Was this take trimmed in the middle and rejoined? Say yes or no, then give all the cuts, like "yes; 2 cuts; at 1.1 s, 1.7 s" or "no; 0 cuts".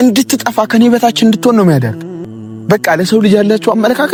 no; 0 cuts